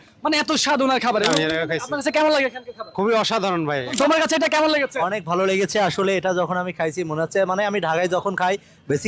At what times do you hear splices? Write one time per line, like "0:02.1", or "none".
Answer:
0:01.3
0:03.9